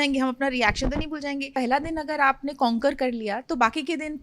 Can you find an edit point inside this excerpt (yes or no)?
yes